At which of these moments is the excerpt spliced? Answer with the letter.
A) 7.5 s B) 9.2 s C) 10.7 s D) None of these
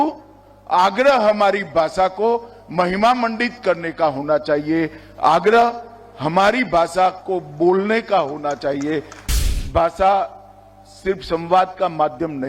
B